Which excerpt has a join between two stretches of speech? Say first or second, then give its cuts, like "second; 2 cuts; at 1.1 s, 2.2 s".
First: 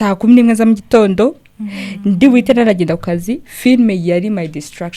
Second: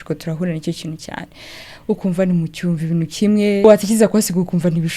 second; 1 cut; at 3.6 s